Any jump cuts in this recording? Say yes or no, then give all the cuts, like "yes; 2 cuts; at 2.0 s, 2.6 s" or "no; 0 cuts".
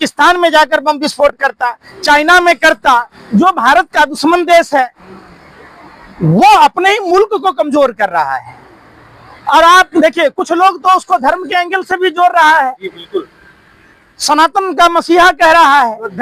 no; 0 cuts